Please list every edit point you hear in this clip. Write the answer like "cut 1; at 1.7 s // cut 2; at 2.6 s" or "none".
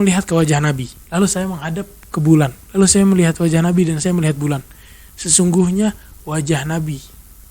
cut 1; at 0.9 s // cut 2; at 2.6 s